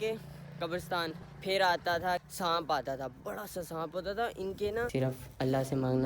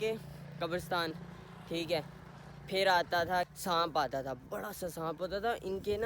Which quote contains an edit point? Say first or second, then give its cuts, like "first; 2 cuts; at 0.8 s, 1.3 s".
first; 2 cuts; at 1.3 s, 4.9 s